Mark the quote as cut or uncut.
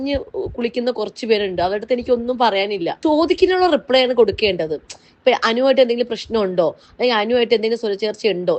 cut